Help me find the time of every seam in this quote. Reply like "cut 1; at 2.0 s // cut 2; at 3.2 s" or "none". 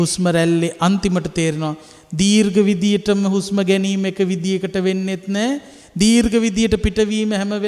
none